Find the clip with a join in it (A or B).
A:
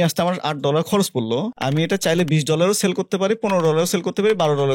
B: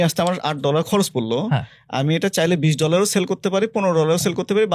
A